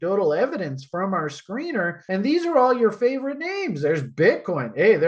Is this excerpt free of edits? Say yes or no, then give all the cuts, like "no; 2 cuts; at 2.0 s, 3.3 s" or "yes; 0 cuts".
no; 1 cut; at 2.0 s